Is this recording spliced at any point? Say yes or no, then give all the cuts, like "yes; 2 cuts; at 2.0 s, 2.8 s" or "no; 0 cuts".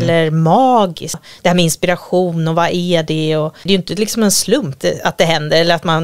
yes; 3 cuts; at 1.3 s, 3.5 s, 4.8 s